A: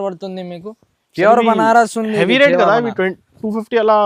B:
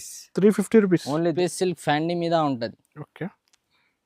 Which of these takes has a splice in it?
B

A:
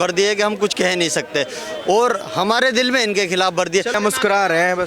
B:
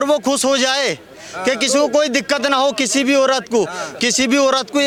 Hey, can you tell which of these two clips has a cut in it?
A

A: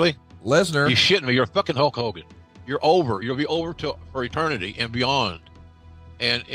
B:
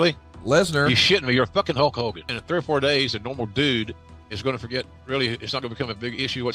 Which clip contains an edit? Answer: B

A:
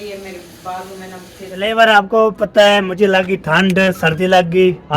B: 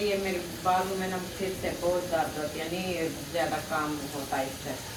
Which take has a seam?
A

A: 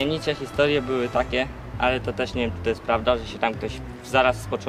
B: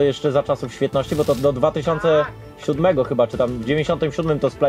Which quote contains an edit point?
B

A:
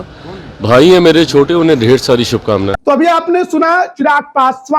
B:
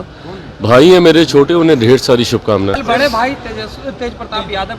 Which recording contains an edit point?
B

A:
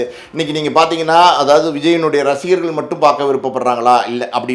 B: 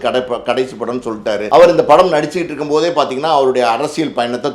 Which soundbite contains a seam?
B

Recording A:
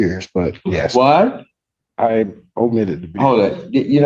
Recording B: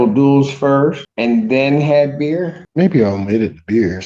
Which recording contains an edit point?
B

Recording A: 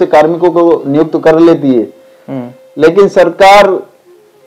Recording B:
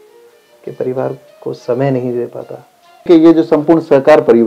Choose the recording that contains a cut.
B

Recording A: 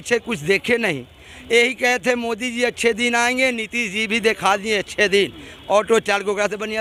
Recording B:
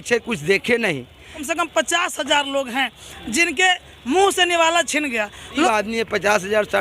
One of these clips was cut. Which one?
B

